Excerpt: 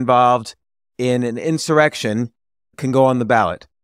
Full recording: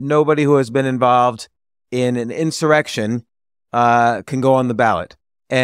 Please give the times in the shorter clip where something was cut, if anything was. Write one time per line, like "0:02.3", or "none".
0:02.7